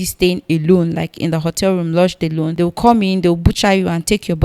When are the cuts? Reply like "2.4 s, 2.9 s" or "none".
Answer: 2.5 s